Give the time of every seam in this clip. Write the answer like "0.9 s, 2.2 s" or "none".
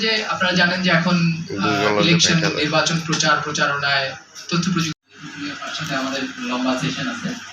5.1 s